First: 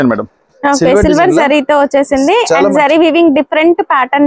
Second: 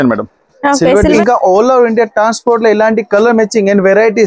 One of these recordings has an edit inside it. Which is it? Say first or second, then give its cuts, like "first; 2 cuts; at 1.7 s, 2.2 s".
second; 1 cut; at 1.2 s